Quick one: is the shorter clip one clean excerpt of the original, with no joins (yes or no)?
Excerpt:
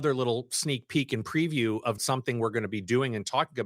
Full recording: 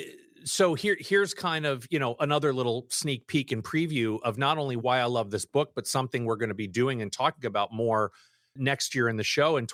no